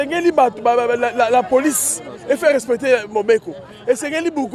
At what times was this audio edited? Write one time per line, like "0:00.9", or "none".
none